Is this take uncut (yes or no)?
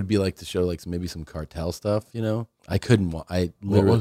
no